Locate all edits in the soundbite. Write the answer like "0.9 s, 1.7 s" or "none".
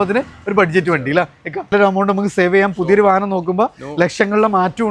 1.7 s